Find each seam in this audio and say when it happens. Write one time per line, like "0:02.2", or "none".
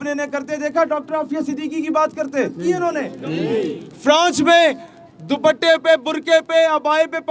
0:02.6